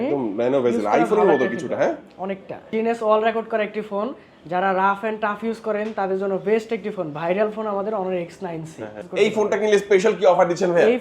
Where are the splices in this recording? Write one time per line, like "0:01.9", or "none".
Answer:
0:02.6
0:09.0

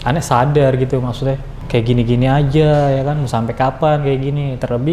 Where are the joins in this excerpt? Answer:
0:01.5

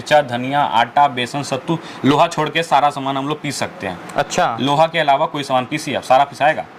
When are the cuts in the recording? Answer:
none

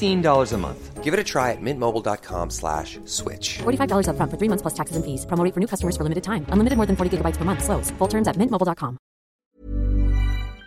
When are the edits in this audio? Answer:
0:09.3

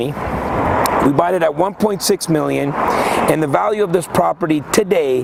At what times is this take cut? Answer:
none

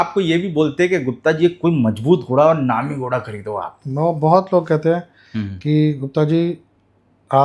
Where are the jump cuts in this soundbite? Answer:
none

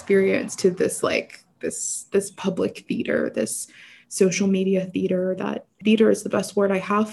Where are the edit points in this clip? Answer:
0:05.8

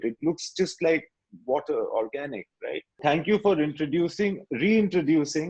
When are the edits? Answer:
0:03.0

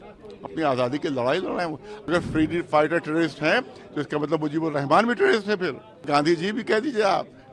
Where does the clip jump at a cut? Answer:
0:02.1
0:06.0

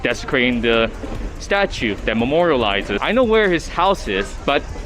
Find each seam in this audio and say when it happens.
0:03.0

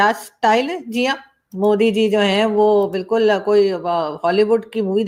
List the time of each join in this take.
none

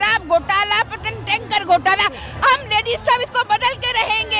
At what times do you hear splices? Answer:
none

